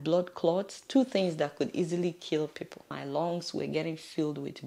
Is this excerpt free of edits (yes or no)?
no